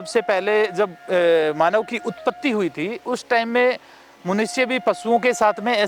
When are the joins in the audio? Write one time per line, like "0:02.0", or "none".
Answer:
none